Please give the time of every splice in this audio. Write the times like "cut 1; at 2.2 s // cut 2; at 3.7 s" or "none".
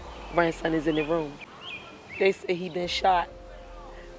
cut 1; at 1.4 s